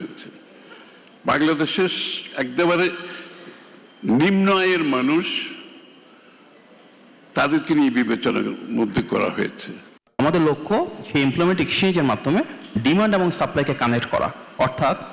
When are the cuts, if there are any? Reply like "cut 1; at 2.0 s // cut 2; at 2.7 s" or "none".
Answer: cut 1; at 10.0 s